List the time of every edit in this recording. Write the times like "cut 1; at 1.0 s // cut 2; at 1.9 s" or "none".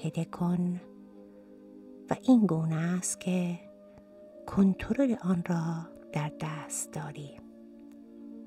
cut 1; at 7.3 s